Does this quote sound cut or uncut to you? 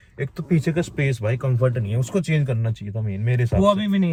uncut